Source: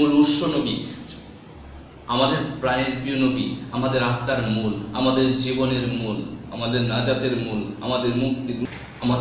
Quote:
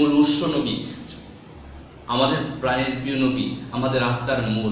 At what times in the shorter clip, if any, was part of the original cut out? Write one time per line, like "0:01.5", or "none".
none